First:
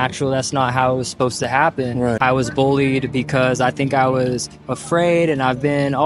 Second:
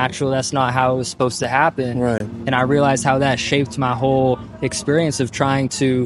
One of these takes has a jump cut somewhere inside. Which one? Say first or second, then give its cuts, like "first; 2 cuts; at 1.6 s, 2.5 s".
first; 1 cut; at 2.2 s